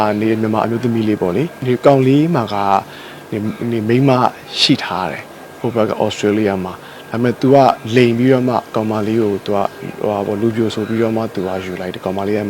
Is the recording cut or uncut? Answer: cut